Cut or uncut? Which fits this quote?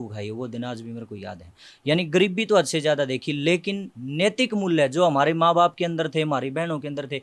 uncut